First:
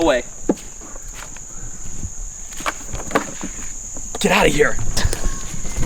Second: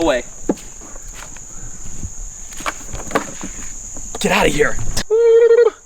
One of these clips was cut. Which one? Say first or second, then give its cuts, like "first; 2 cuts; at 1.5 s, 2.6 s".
second; 1 cut; at 4.9 s